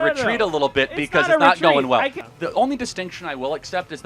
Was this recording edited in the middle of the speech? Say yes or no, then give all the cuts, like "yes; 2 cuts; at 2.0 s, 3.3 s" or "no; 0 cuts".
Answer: yes; 1 cut; at 2.2 s